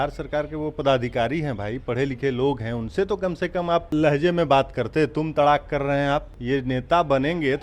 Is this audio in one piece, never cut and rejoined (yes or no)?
no